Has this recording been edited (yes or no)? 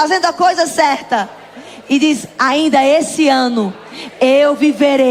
no